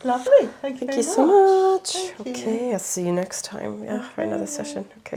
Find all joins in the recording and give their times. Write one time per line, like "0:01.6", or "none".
none